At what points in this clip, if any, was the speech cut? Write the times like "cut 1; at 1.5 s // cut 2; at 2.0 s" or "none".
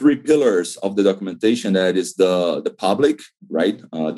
none